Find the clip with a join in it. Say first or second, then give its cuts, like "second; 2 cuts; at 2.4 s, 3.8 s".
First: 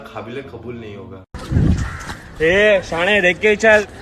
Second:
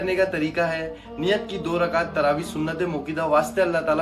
first; 1 cut; at 1.4 s